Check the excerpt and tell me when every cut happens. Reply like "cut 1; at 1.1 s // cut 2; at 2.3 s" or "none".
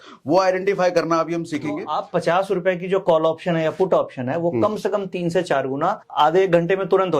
cut 1; at 1.9 s // cut 2; at 6.0 s